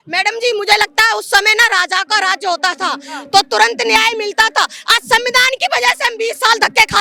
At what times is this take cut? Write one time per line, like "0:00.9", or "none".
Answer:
none